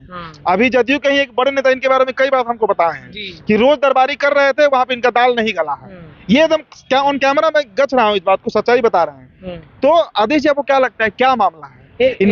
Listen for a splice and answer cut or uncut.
uncut